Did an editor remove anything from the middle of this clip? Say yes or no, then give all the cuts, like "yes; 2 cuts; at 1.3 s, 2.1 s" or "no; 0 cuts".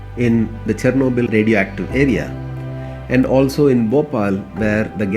no; 0 cuts